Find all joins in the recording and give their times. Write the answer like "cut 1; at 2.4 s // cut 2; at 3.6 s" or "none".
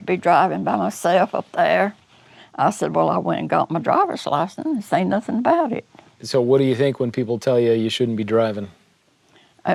none